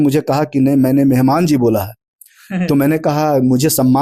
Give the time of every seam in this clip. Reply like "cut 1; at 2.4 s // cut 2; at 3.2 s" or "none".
none